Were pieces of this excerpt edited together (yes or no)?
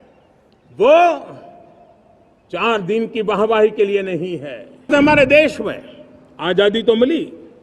yes